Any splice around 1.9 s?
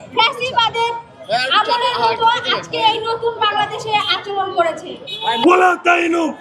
no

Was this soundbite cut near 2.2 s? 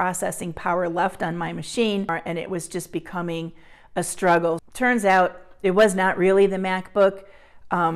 yes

